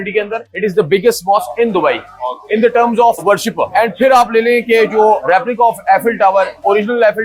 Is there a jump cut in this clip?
no; 0 cuts

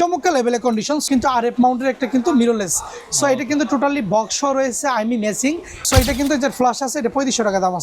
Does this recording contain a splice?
yes; 2 cuts; at 1.1 s, 5.8 s

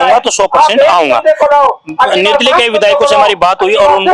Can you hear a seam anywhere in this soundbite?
no; 0 cuts

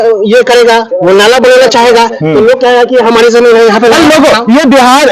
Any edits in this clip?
no; 0 cuts

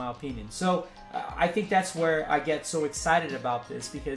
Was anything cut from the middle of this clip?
yes; 1 cut; at 1.0 s

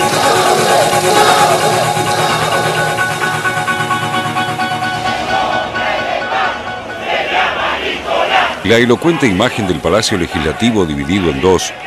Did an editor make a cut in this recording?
no; 0 cuts

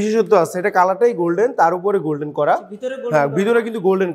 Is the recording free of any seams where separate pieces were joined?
yes; 0 cuts

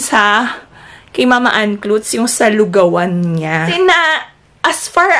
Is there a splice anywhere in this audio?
yes; 1 cut; at 3.7 s

